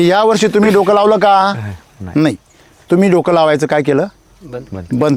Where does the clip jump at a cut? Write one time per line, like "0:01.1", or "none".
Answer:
none